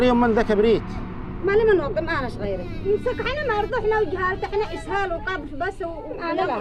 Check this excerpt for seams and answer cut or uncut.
uncut